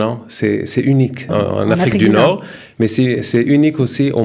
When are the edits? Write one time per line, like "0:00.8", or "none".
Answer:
none